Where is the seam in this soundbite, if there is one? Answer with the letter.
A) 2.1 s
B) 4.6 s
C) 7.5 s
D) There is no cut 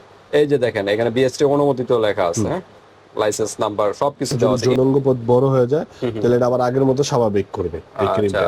B